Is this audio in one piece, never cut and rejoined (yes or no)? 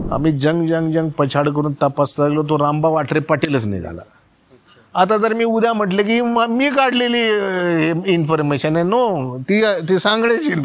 yes